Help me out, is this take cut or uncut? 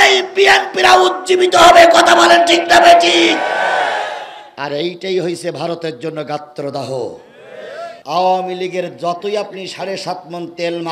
cut